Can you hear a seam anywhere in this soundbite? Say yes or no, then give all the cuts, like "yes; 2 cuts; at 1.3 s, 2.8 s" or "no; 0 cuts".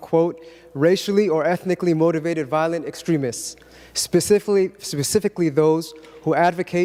no; 0 cuts